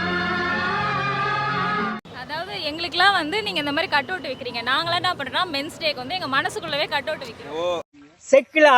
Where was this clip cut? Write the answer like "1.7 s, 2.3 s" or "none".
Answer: none